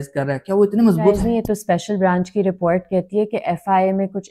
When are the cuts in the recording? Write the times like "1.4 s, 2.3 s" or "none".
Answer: 1.2 s